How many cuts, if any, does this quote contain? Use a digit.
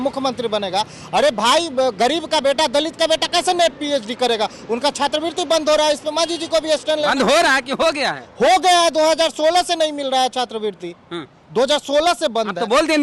0